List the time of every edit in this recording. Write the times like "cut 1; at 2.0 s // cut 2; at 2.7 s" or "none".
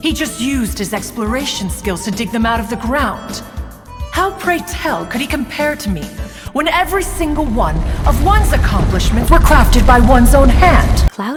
none